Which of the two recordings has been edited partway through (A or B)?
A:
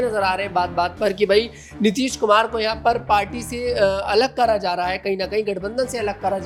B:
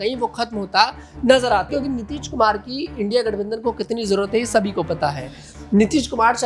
B